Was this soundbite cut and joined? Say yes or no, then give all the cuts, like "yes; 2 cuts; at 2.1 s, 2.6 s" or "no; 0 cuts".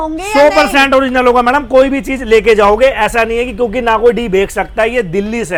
no; 0 cuts